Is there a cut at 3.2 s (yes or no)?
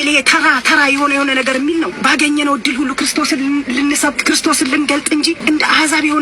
no